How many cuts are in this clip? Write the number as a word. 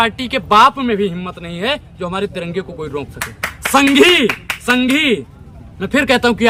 zero